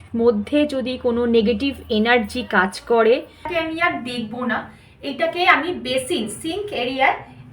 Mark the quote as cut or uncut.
cut